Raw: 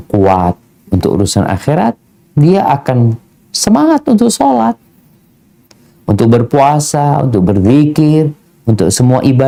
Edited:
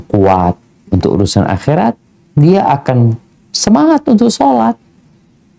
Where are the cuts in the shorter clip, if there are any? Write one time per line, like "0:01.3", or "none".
none